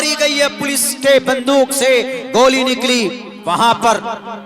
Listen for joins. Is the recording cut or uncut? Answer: cut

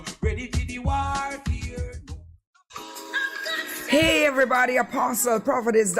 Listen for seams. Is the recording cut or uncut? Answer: cut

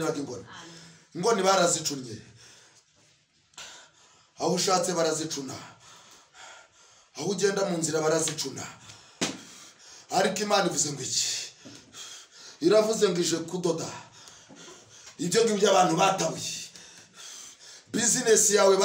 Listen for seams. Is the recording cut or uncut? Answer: uncut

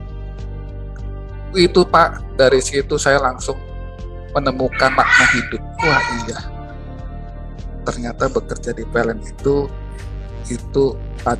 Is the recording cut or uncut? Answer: uncut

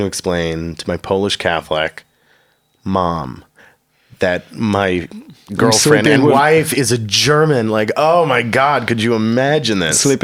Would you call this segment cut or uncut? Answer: uncut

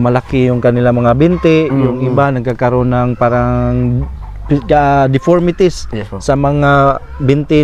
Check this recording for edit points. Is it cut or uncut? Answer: uncut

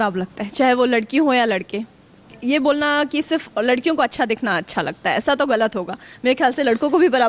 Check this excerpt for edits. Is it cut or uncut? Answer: uncut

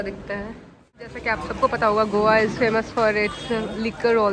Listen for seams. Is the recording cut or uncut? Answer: cut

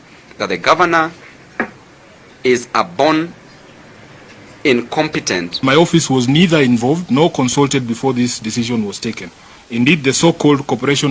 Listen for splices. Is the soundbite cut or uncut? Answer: cut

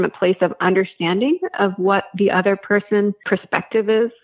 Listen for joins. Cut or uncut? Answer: cut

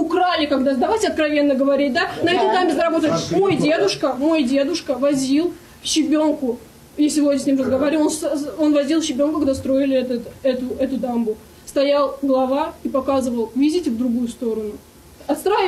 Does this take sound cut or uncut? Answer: uncut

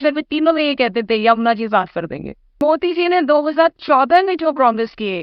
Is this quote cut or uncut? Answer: cut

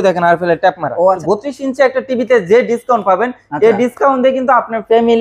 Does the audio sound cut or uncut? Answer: cut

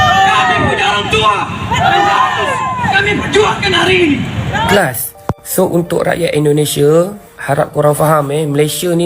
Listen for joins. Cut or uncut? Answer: cut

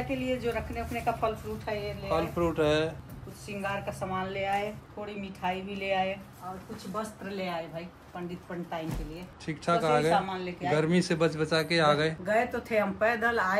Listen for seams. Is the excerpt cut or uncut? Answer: cut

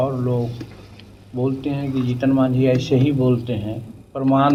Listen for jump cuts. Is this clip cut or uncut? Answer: uncut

